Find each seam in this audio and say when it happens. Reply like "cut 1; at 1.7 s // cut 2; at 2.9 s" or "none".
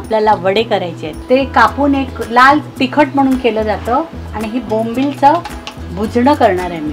cut 1; at 1.2 s // cut 2; at 4.2 s